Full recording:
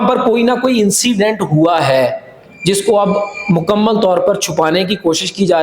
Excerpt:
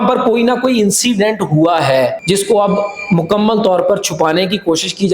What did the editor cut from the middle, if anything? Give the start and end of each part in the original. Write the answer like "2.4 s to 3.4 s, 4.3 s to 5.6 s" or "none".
2.2 s to 2.6 s